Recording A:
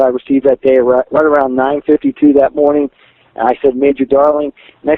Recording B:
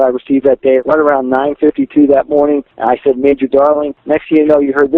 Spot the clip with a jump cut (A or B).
B